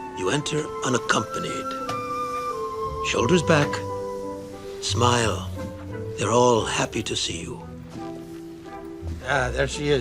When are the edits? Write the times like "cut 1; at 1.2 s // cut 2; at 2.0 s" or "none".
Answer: cut 1; at 2.3 s